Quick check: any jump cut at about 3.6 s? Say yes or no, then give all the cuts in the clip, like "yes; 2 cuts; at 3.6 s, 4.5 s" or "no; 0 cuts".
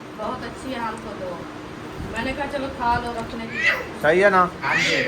yes; 1 cut; at 3.6 s